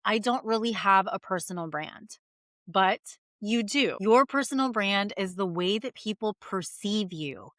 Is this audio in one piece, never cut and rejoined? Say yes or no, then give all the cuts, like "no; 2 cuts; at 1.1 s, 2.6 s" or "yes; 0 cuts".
no; 1 cut; at 4.0 s